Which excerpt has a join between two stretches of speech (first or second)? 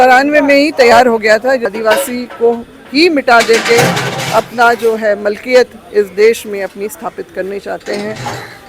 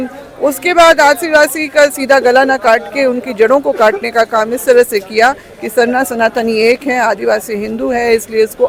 first